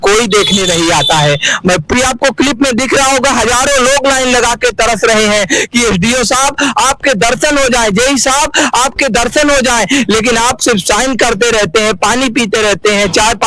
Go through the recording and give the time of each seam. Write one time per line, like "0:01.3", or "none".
0:01.9